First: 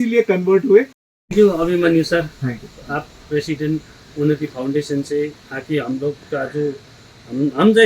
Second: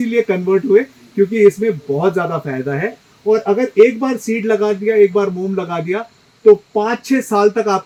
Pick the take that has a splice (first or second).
first